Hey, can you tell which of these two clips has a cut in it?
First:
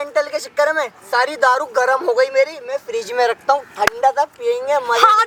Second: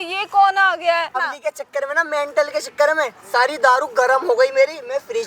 second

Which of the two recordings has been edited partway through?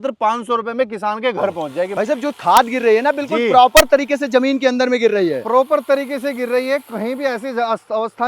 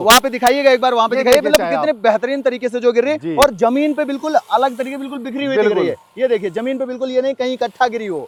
first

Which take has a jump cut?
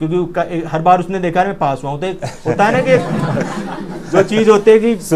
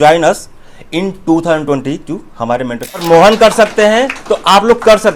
second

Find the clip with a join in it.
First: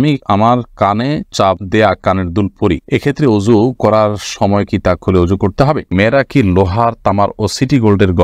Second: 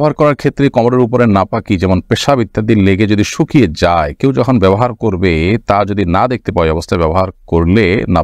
first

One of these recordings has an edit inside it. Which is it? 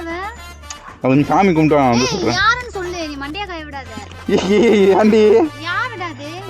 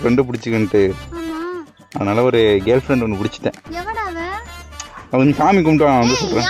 first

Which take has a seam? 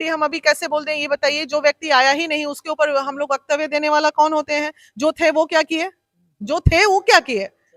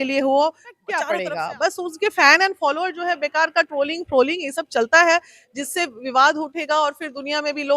second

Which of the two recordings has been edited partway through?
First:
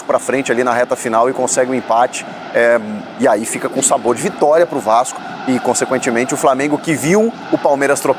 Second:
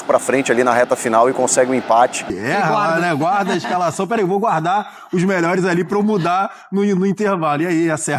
second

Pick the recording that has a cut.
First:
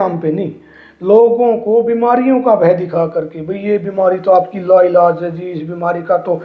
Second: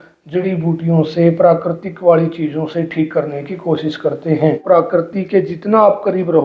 second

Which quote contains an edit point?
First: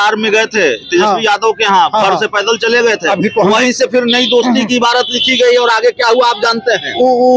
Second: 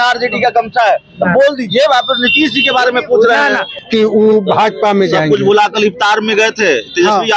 second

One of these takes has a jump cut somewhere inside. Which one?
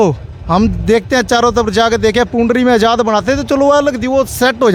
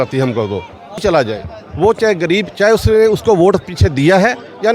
second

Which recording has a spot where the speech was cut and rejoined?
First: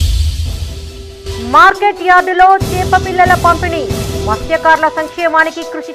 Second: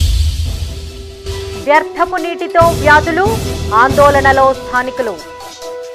second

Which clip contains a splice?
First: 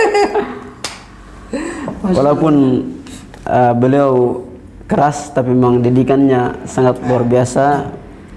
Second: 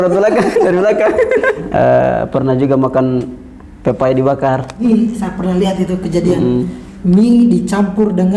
second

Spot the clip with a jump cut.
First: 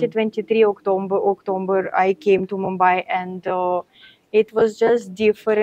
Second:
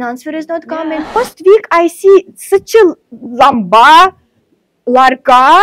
second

